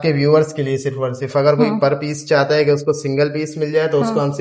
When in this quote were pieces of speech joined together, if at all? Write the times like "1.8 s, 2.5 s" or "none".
none

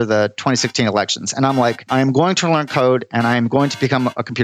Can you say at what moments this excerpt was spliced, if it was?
1.9 s

